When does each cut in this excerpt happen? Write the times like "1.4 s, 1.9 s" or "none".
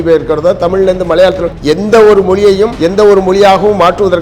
1.5 s, 2.8 s